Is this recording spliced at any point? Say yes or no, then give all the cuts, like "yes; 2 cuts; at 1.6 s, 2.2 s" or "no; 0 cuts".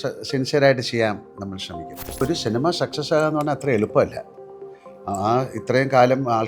yes; 1 cut; at 2.2 s